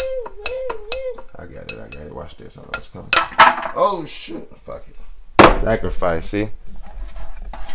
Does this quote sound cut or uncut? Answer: uncut